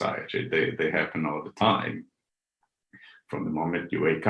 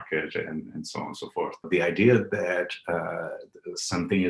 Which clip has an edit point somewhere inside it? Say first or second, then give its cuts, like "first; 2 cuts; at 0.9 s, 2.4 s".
second; 1 cut; at 1.6 s